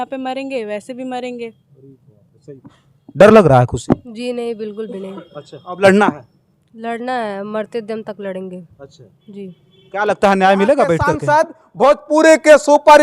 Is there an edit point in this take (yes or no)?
yes